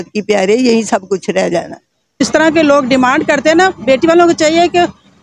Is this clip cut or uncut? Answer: cut